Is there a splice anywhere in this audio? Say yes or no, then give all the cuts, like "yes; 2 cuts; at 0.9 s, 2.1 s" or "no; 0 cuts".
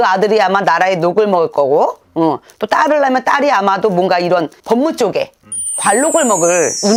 no; 0 cuts